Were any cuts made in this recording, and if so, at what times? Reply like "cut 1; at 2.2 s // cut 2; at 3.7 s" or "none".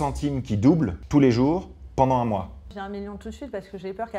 cut 1; at 1.0 s // cut 2; at 2.7 s